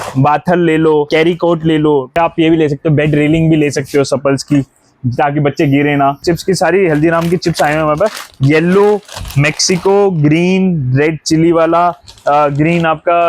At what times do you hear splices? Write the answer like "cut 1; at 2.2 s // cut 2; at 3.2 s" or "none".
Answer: cut 1; at 2.1 s // cut 2; at 6.2 s